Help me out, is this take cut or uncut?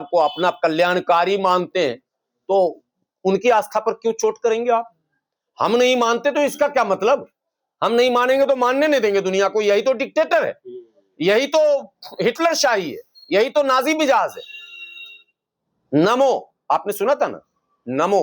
uncut